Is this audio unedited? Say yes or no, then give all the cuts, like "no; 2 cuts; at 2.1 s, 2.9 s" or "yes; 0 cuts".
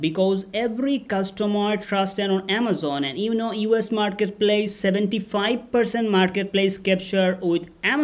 yes; 0 cuts